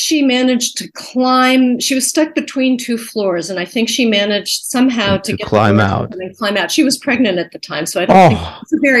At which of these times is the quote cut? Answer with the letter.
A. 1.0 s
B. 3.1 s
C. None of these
C